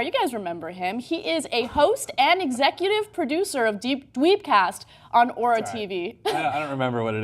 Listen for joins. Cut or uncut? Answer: cut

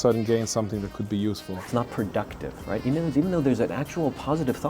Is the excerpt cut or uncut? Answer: cut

